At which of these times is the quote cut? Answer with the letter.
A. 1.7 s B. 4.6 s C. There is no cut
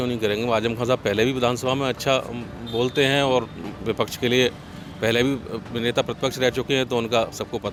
C